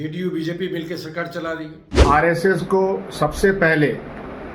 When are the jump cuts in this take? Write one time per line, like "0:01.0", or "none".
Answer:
0:02.0